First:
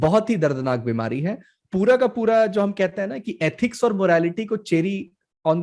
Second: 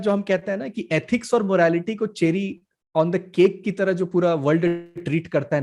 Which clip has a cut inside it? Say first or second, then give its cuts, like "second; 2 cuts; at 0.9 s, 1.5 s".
first; 1 cut; at 1.6 s